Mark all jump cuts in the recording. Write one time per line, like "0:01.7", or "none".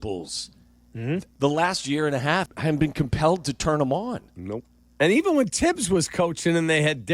0:01.3
0:02.5